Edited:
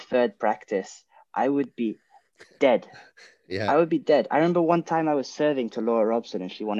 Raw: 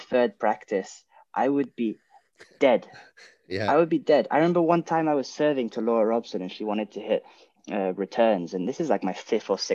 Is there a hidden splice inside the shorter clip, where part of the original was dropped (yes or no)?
no